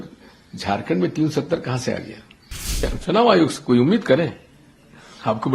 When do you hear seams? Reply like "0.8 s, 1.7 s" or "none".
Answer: 2.7 s